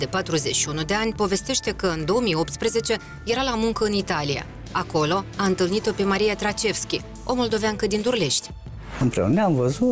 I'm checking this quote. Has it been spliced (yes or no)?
yes